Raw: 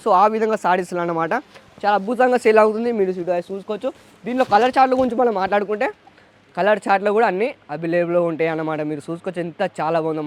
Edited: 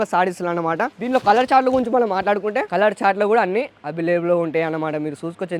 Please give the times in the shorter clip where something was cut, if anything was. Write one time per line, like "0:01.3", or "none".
0:01.0
0:02.7